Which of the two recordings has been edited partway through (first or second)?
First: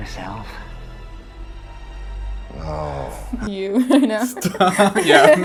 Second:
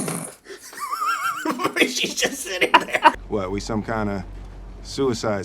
second